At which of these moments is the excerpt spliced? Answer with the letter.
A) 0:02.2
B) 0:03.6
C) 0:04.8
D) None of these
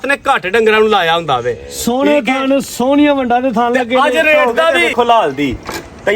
C